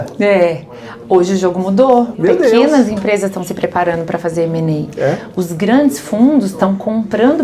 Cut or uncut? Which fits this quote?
uncut